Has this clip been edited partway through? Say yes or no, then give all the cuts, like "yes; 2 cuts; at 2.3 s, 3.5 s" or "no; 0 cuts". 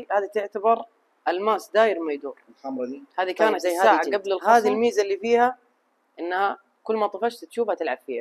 yes; 1 cut; at 4.4 s